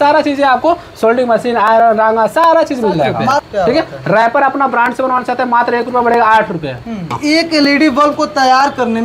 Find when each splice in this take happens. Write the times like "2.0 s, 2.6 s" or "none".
3.4 s, 7.2 s